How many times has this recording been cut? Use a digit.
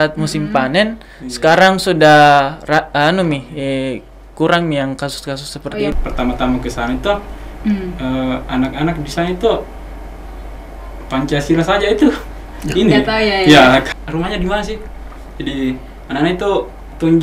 2